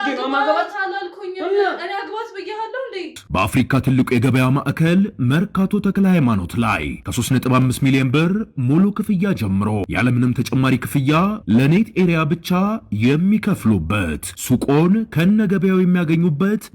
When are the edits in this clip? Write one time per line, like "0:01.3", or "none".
0:03.2